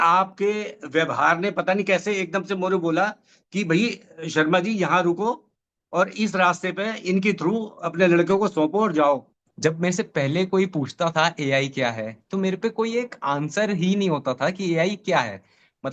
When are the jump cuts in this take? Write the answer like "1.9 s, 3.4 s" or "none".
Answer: 9.4 s